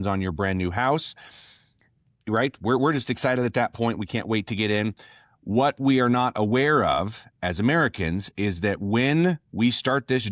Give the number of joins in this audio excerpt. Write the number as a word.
zero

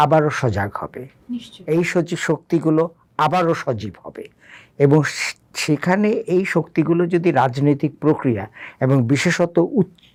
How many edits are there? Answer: zero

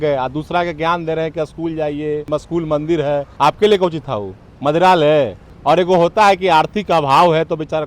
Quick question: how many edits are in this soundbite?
three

